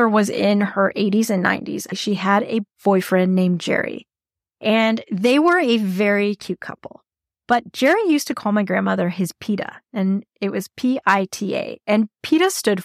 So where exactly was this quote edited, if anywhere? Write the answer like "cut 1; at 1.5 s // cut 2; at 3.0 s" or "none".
cut 1; at 1.9 s